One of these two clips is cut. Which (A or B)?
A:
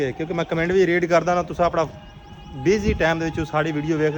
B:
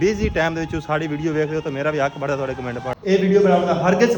B